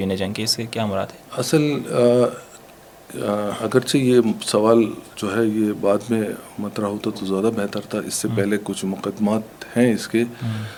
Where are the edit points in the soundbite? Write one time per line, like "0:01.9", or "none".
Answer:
none